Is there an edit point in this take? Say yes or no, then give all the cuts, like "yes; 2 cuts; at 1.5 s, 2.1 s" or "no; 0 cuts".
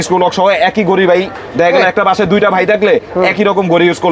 no; 0 cuts